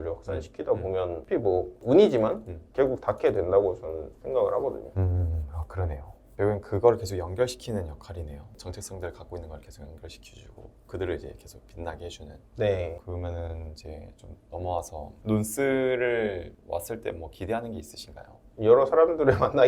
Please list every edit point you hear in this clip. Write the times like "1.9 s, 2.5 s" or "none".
none